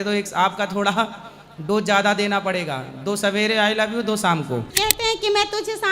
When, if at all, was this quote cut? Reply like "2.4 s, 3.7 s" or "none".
4.7 s